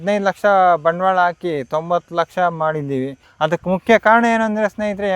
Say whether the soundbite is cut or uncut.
cut